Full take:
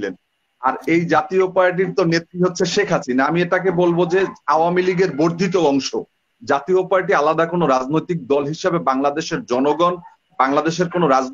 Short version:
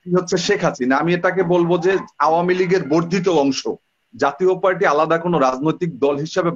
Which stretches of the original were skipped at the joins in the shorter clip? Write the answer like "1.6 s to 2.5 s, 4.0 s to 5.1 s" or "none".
none